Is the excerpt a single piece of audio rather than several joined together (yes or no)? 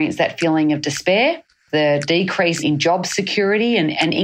no